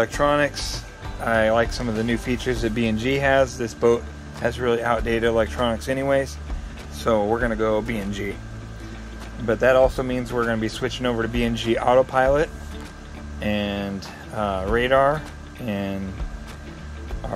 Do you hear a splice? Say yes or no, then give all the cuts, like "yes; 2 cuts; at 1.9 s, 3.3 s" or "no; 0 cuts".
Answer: no; 0 cuts